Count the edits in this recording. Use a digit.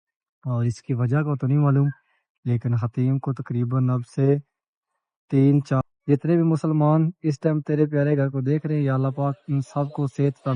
1